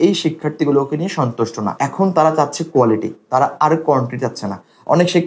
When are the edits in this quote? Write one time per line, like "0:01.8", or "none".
none